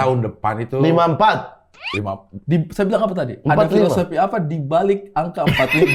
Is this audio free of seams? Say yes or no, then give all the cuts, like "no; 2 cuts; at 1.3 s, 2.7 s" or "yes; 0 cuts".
yes; 0 cuts